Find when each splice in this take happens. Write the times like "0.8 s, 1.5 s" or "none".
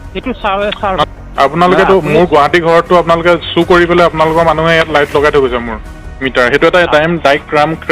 1.0 s